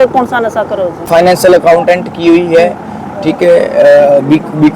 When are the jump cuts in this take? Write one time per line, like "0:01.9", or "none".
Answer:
0:01.1